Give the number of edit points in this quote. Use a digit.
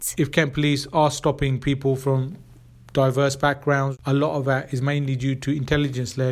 1